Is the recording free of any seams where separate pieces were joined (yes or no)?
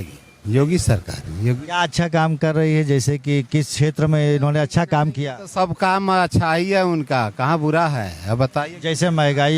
yes